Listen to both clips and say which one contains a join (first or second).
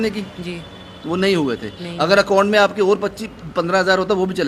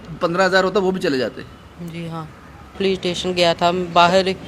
second